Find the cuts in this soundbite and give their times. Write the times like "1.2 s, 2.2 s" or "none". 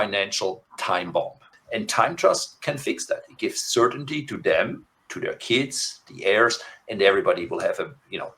1.5 s